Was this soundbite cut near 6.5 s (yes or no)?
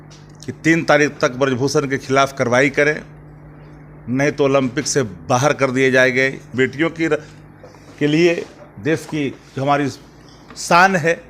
yes